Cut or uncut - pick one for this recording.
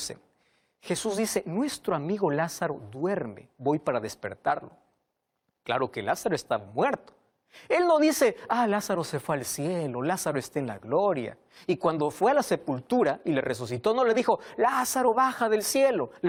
uncut